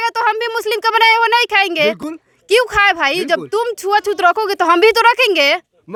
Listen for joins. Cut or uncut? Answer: uncut